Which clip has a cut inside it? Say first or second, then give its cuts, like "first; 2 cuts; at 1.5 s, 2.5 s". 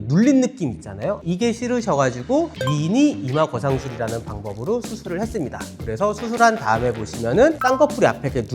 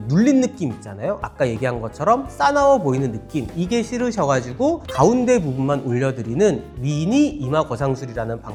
first; 3 cuts; at 1.2 s, 2.6 s, 7.6 s